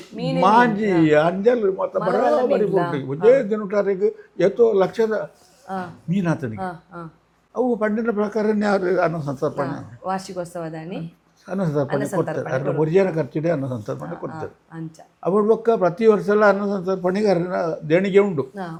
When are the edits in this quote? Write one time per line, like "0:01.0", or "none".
none